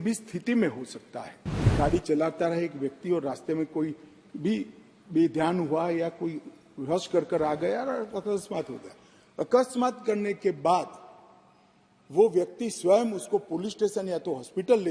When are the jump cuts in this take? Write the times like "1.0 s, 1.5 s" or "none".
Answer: 1.7 s